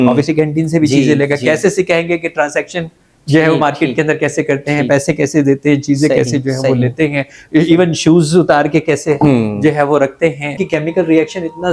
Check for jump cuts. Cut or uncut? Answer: cut